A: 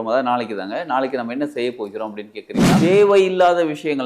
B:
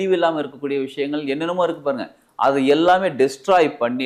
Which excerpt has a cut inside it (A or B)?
A